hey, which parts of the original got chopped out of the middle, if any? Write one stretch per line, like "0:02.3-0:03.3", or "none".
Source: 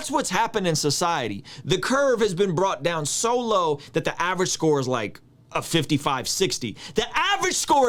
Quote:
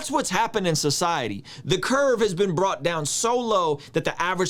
none